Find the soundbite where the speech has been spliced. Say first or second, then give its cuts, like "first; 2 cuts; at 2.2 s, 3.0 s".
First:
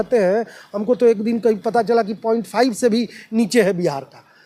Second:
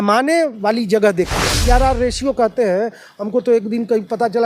second; 1 cut; at 1.5 s